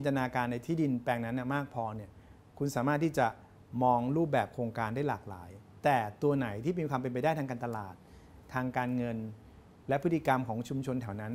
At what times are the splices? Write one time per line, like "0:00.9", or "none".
none